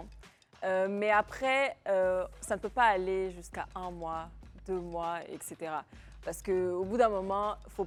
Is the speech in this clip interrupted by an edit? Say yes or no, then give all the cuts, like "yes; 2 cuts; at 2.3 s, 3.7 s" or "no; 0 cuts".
no; 0 cuts